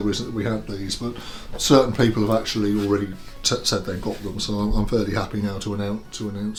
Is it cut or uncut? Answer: uncut